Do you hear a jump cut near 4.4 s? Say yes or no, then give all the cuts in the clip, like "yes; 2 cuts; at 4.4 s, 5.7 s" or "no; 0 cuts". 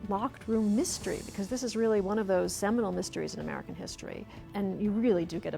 yes; 1 cut; at 4.4 s